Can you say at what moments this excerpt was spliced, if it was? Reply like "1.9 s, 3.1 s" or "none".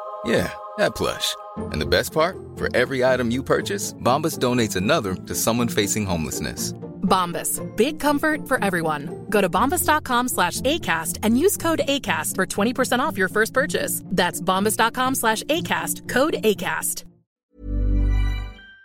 17.5 s